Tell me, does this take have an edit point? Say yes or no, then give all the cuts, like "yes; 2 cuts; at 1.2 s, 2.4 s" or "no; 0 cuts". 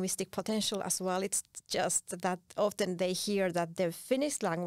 no; 0 cuts